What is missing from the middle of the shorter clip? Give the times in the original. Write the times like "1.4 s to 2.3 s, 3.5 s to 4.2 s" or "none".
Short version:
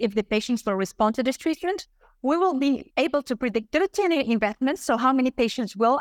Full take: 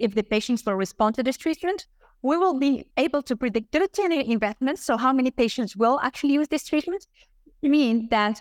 none